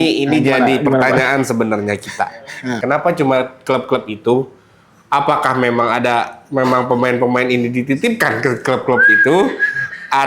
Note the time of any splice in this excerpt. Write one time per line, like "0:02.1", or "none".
0:02.8